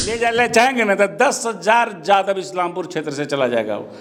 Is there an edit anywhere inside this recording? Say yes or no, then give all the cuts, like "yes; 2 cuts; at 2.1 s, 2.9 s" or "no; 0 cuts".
no; 0 cuts